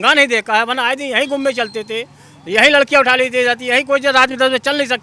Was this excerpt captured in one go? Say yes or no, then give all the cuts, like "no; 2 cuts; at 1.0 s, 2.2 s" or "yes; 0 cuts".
yes; 0 cuts